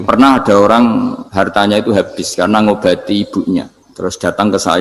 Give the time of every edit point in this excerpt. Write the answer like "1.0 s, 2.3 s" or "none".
1.2 s, 3.8 s

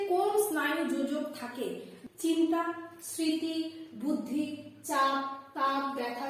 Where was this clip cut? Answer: 1.9 s

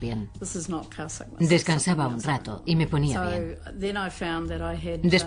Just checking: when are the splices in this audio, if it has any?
3.3 s

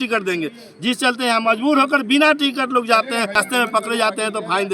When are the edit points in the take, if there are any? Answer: 3.4 s

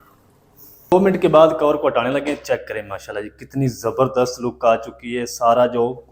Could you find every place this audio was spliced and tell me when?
0.9 s

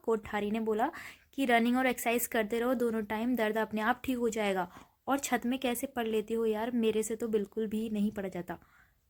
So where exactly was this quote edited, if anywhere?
none

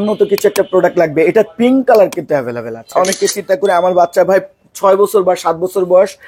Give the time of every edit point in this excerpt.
2.9 s

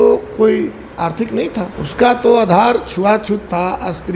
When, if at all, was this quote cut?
1.8 s

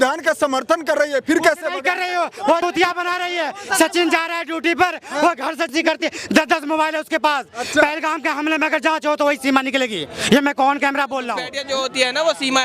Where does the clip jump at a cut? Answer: 2.6 s, 5.7 s, 11.5 s

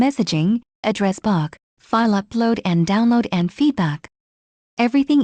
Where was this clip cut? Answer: none

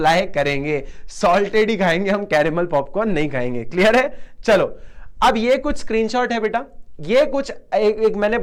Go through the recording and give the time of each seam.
none

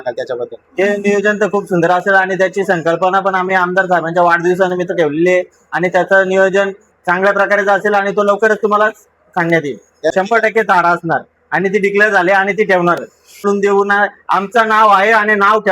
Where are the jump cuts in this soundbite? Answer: 10.1 s, 13.4 s

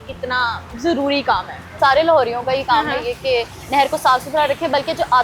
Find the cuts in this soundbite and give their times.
1.6 s

